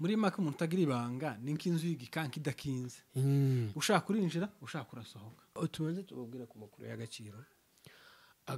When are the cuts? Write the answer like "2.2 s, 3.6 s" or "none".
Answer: 5.6 s